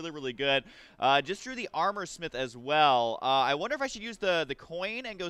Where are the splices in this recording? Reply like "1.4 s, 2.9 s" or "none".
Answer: 1.1 s